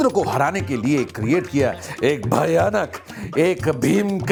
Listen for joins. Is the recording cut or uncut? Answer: uncut